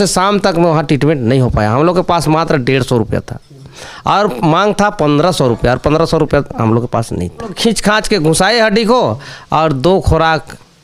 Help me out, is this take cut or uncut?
cut